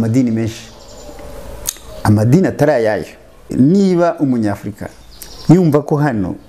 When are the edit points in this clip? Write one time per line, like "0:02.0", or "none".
0:03.5